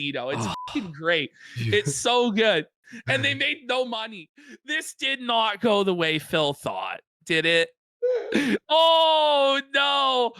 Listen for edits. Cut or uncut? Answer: cut